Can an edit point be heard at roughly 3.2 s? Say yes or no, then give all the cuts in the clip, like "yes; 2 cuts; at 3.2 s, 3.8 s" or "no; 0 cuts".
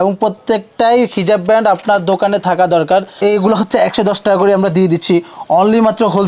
yes; 1 cut; at 3.2 s